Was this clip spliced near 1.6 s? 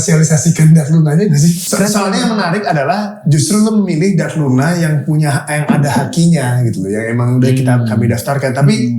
yes; 1 cut; at 1.6 s

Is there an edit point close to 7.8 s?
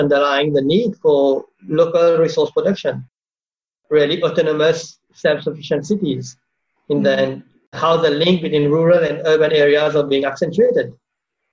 yes; 1 cut; at 7.8 s

